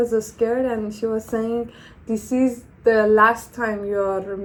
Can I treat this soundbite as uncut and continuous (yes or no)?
yes